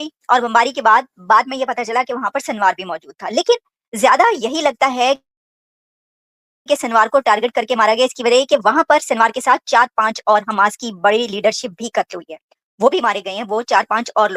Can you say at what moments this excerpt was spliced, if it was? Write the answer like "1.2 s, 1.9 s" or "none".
none